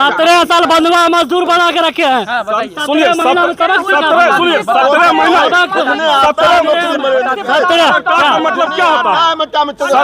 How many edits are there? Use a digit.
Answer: 0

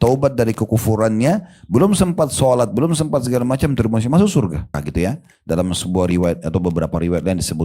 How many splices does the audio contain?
1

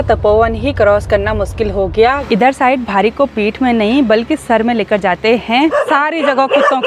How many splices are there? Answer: 2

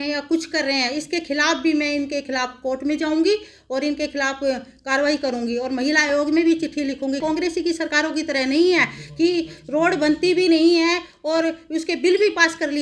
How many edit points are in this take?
1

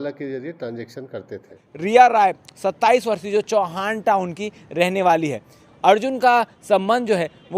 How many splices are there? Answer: 1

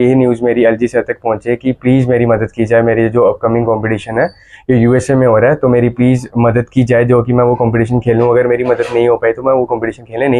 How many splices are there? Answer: 0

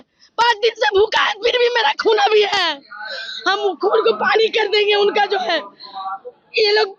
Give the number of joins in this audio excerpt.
0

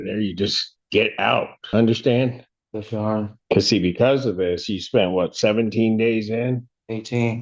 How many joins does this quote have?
2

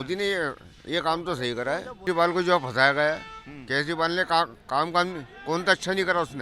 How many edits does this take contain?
1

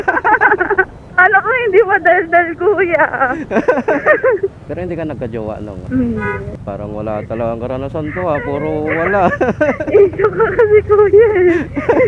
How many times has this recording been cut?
2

